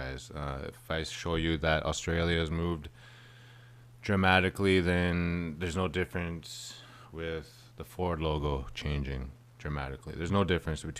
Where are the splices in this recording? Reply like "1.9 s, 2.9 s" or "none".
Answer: 4.7 s